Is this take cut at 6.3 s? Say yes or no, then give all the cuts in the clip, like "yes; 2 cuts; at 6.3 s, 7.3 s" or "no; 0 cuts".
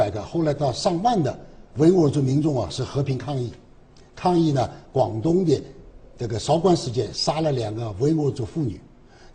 no; 1 cut; at 8.4 s